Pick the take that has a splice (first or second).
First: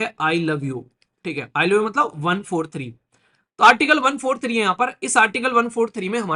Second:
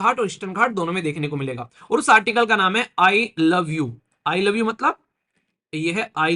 second